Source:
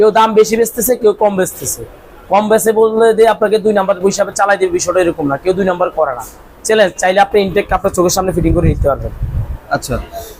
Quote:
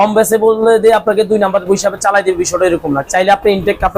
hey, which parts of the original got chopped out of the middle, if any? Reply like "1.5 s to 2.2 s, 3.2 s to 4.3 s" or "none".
5.4 s to 6.9 s